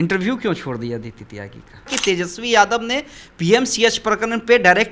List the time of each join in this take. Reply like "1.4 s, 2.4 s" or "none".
1.9 s